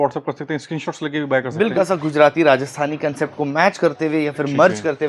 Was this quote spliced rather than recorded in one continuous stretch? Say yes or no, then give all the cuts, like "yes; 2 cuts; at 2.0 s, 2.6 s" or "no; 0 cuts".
yes; 1 cut; at 1.7 s